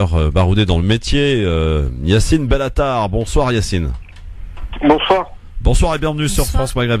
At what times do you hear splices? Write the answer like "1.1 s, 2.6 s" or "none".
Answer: 5.8 s